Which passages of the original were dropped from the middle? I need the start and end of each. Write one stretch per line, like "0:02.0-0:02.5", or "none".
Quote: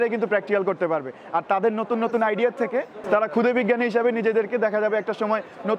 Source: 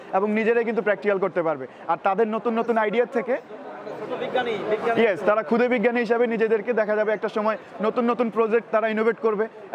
0:03.6-0:05.2